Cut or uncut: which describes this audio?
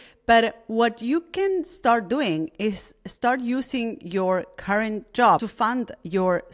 cut